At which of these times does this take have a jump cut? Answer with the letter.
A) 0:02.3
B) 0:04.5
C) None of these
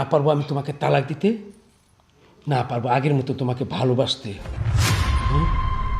B